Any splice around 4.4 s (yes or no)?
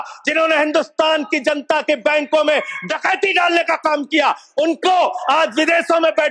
no